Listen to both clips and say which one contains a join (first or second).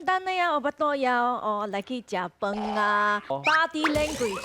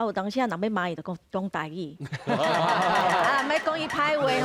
first